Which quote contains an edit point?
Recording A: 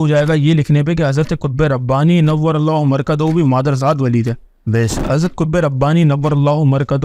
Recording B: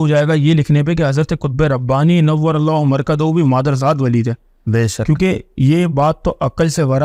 A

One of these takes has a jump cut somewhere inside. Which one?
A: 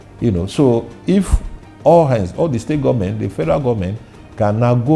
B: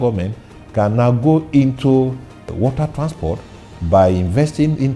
B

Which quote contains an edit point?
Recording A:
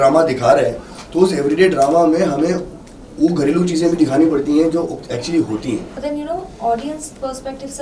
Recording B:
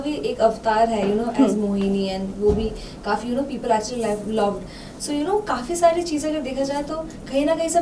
A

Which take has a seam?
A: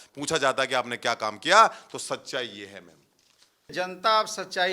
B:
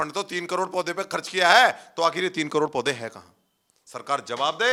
A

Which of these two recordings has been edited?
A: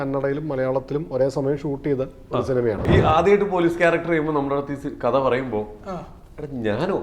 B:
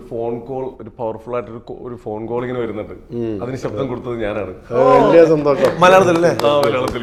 A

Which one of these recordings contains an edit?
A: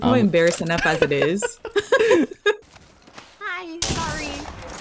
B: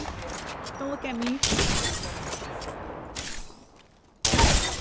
A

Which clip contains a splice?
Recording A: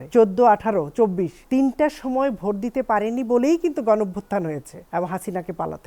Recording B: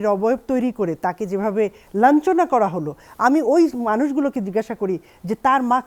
A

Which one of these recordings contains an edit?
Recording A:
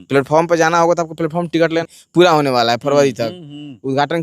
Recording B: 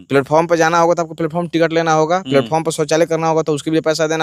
A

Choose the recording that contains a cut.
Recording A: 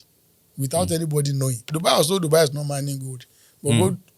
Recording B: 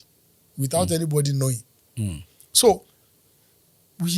A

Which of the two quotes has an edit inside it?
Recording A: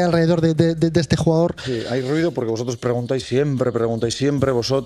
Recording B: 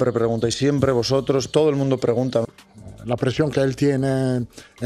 B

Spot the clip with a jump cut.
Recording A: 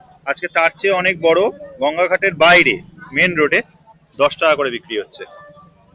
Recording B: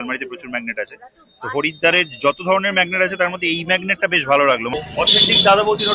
B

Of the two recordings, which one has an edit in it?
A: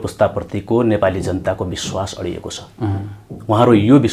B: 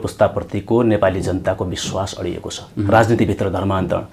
B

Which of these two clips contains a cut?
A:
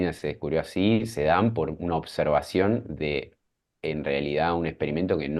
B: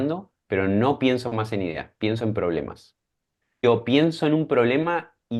B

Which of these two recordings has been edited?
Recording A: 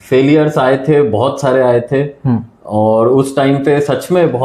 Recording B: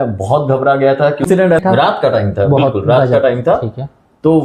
B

